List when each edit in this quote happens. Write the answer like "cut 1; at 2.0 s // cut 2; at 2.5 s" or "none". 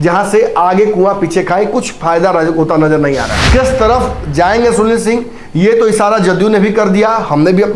cut 1; at 3.3 s